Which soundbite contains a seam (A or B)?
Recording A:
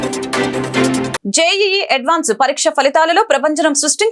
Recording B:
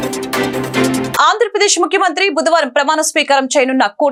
A